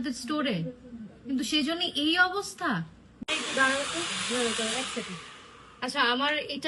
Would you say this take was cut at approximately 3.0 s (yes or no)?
yes